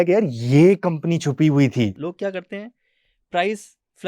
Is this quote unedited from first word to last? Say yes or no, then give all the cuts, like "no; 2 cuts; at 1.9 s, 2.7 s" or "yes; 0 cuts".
no; 1 cut; at 2.0 s